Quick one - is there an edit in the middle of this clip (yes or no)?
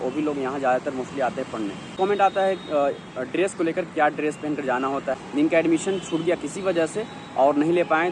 yes